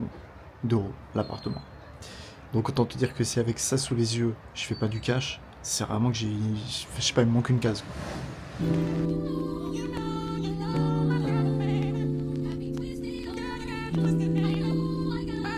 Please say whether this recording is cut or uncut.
uncut